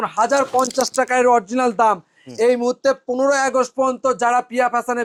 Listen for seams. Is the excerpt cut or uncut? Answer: uncut